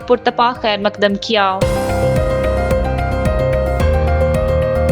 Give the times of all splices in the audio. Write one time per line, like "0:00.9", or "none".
0:01.6